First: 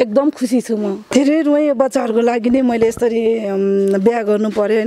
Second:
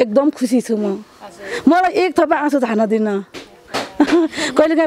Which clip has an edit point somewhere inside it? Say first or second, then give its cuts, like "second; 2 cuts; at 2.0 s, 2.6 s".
first; 1 cut; at 1.1 s